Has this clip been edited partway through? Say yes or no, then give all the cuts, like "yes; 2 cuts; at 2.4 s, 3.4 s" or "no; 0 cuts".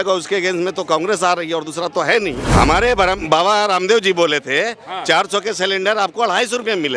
yes; 1 cut; at 2.4 s